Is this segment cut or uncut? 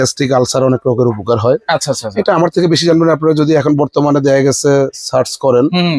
uncut